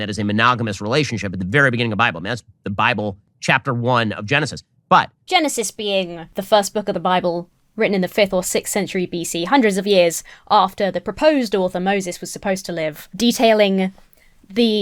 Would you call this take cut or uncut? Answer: uncut